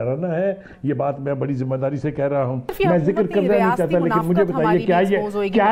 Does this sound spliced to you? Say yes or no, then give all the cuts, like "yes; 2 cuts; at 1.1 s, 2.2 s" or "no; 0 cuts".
no; 0 cuts